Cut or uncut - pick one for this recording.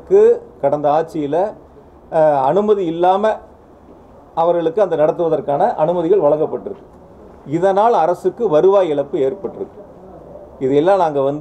uncut